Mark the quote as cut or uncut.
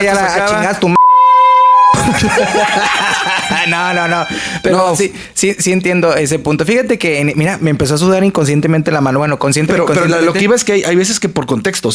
uncut